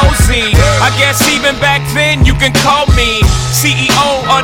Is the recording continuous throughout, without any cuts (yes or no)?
yes